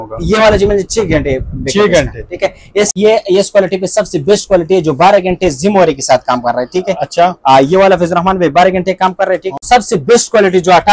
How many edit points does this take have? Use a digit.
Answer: 2